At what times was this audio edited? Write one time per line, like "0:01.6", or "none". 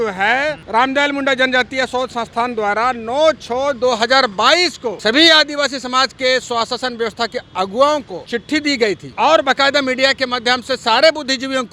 none